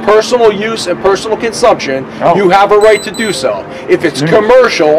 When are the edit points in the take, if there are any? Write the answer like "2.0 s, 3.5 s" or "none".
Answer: none